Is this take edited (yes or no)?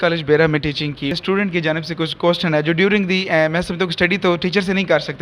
yes